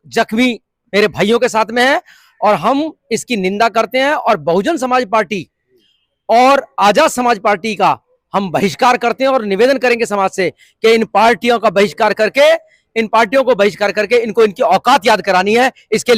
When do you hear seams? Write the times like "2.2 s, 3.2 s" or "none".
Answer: none